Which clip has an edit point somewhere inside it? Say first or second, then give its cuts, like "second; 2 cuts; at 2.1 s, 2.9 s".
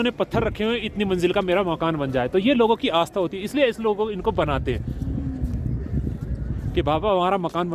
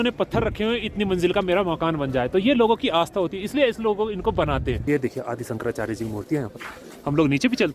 second; 1 cut; at 4.8 s